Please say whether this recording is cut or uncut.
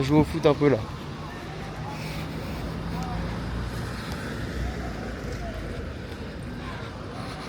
uncut